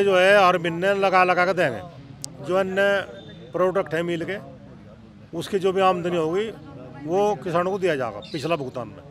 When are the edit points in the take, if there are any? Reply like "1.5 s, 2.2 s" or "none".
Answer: none